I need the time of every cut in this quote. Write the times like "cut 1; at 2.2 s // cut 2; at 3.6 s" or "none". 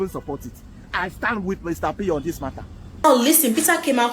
cut 1; at 3.0 s